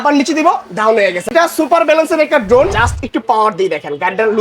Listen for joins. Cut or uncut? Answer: cut